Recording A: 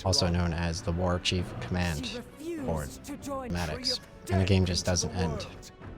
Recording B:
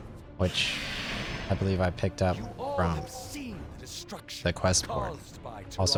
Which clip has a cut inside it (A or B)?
A